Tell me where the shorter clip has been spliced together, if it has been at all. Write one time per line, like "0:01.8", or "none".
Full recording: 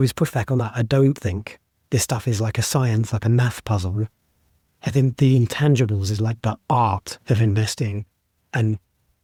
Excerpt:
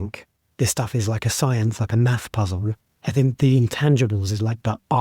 0:02.9